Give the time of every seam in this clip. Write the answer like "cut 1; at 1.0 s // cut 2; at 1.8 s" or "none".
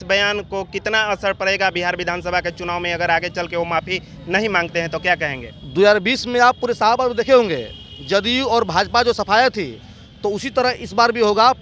none